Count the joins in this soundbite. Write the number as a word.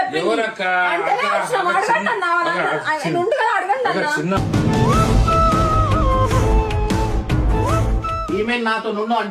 one